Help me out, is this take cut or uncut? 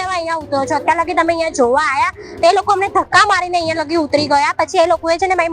uncut